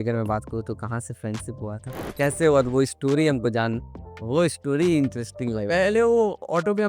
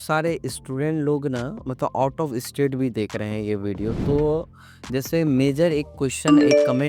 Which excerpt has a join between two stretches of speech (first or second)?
first